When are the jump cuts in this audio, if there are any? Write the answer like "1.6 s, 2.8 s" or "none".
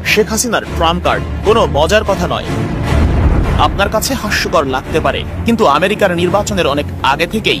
none